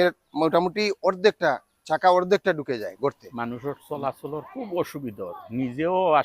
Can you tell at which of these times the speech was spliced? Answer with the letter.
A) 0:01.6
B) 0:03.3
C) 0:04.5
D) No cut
B